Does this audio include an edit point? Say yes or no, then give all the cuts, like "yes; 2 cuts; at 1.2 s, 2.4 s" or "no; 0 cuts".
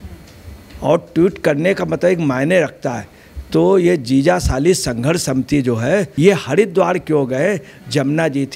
yes; 1 cut; at 6.1 s